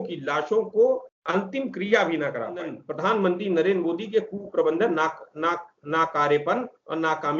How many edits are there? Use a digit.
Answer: 2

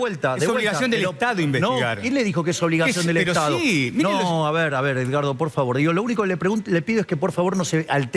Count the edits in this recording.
0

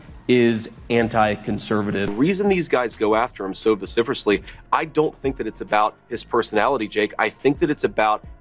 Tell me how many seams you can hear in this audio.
1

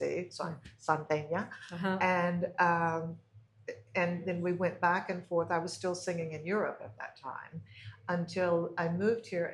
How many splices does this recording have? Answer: 0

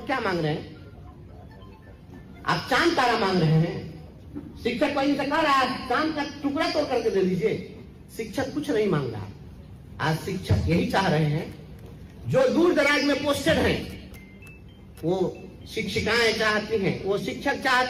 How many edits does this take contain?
0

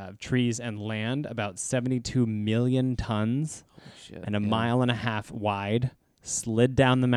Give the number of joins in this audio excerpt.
0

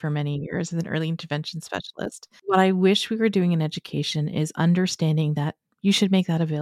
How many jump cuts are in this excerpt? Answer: 1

